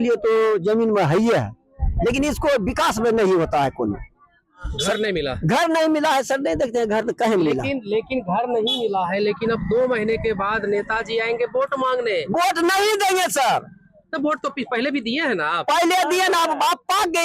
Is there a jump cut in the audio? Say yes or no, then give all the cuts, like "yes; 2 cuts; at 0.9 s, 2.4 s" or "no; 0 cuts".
no; 0 cuts